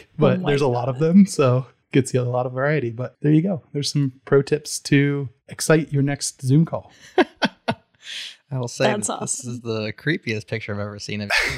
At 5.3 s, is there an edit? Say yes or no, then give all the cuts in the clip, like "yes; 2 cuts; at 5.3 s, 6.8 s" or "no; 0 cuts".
no; 2 cuts; at 1.7 s, 3.1 s